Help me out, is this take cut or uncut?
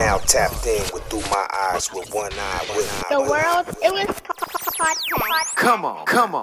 cut